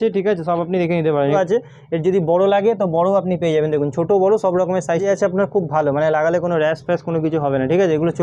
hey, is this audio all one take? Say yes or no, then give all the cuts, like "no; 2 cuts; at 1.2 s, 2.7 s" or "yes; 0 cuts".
no; 2 cuts; at 1.3 s, 5.0 s